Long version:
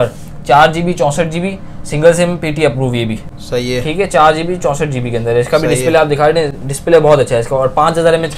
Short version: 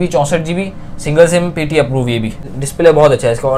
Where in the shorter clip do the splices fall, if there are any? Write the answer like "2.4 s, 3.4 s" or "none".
2.5 s